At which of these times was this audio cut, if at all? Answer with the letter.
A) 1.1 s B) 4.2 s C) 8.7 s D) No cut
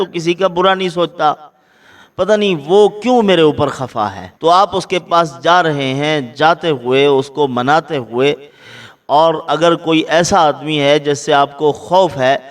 B